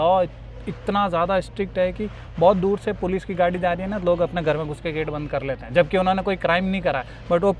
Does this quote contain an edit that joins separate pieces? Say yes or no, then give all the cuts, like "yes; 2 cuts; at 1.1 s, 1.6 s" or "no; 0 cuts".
no; 0 cuts